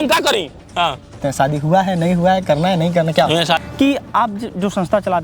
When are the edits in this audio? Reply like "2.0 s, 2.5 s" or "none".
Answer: 1.1 s, 3.6 s